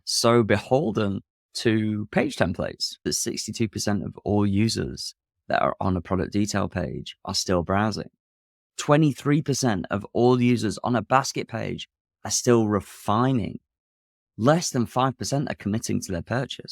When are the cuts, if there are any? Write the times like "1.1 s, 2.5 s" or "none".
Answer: 2.9 s